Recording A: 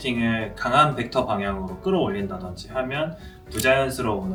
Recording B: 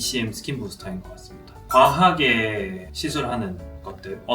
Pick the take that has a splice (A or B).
B